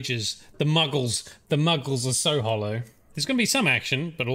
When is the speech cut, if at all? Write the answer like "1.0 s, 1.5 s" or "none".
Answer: 3.1 s